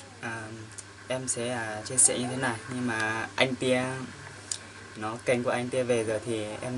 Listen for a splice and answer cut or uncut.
uncut